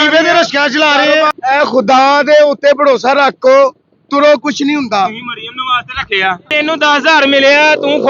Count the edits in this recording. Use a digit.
2